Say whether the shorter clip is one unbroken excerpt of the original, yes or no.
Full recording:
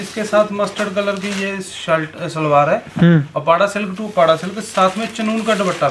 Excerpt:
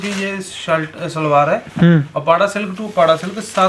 yes